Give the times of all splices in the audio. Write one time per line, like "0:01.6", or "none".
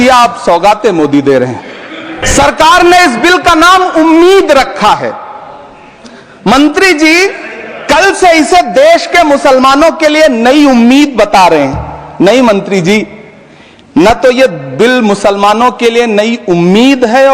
0:02.2

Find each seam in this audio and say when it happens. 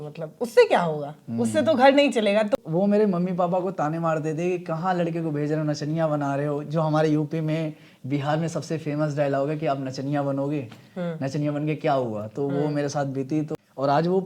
0:02.6
0:13.5

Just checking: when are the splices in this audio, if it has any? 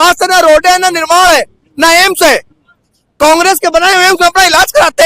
none

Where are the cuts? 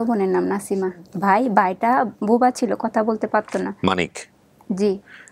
0:01.0

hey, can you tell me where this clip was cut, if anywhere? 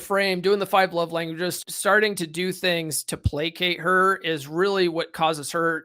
0:01.6

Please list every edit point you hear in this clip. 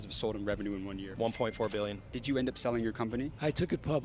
0:01.0
0:02.1

